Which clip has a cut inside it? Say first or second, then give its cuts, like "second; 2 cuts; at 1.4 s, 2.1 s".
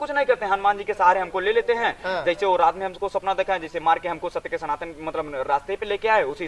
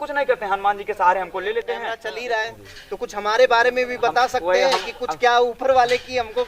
second; 1 cut; at 1.9 s